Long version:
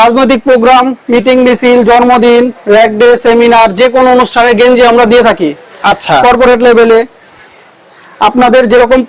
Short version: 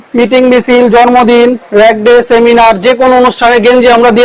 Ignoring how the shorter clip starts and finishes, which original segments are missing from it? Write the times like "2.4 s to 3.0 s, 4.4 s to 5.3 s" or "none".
none

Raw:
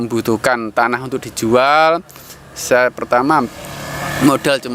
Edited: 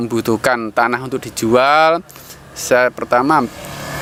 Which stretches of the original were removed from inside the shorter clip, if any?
none

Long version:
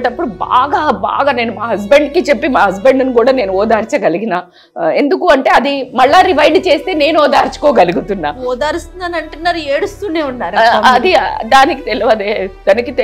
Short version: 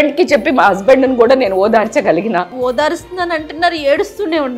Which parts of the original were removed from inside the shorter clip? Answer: 4.5 s to 8.4 s

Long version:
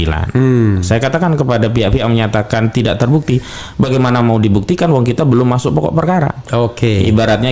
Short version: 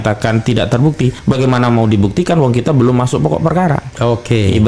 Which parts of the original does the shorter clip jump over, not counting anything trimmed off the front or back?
3.5 s to 3.7 s

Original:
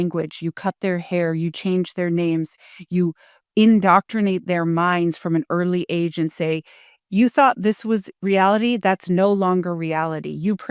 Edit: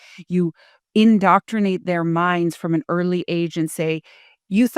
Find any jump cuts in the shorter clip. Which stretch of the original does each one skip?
none

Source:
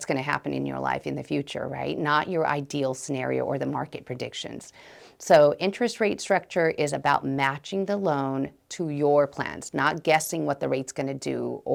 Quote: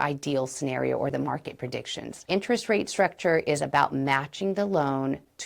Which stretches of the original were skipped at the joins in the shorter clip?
4.7 s to 5.6 s

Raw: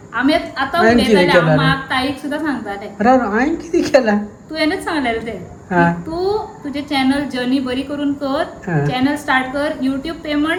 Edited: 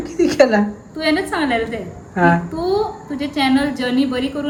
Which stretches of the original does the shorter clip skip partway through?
none

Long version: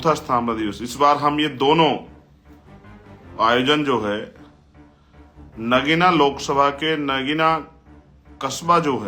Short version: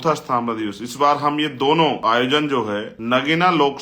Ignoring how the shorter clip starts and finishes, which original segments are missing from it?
2.0 s to 3.4 s, 4.3 s to 5.5 s

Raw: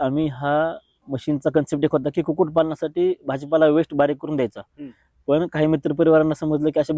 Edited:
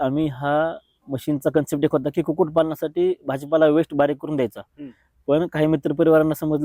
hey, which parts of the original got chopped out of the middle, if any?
none

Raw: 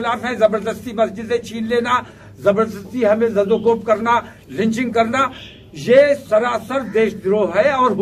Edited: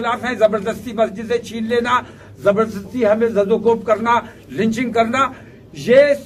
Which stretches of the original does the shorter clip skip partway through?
none

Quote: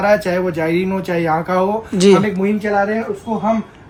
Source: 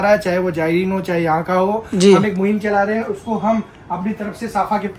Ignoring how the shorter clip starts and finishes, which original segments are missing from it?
none

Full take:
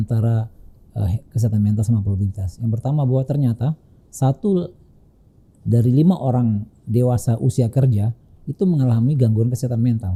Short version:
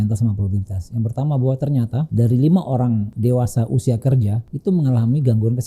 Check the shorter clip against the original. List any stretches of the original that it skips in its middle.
3.8 s to 5.6 s, 6.7 s to 6.8 s, 8.2 s to 8.4 s

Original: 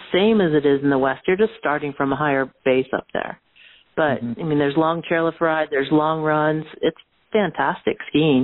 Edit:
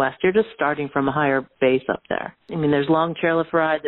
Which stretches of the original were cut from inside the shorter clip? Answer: 3.5 s to 4.3 s

